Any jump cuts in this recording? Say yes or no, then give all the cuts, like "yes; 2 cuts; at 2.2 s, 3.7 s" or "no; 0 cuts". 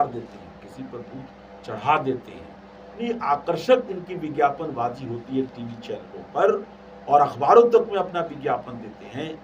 yes; 1 cut; at 3.0 s